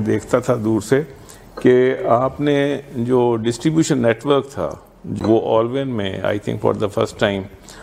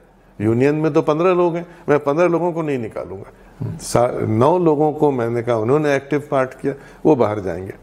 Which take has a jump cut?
first; 1 cut; at 5.2 s

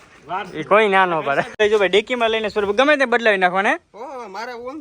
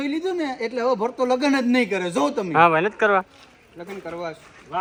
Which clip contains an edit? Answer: first; 1 cut; at 1.5 s

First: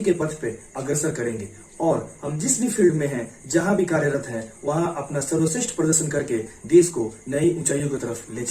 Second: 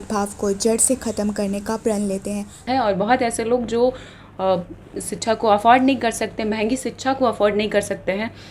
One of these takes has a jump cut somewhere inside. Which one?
second; 1 cut; at 2.6 s

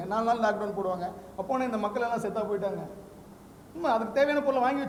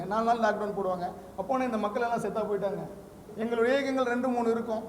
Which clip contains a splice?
second; 1 cut; at 3.2 s

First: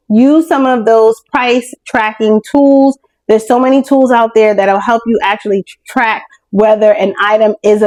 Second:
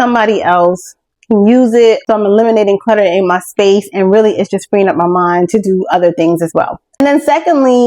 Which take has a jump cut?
second; 2 cuts; at 2.0 s, 6.9 s

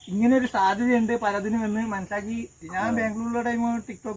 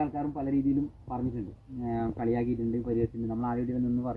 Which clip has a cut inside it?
first; 1 cut; at 2.6 s

